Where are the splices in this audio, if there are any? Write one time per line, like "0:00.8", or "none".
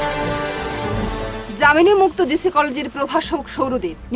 0:01.0